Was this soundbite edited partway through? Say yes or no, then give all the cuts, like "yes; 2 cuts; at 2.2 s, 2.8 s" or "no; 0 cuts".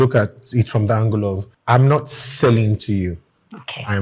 yes; 1 cut; at 1.5 s